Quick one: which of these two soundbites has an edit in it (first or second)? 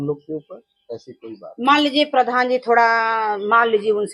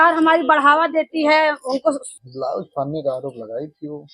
second